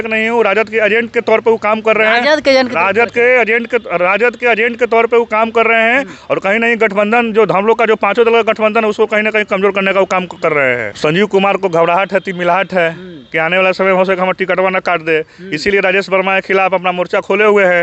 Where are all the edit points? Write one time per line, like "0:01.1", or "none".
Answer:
0:10.9